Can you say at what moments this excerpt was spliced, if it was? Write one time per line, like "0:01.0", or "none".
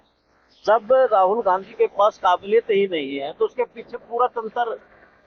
none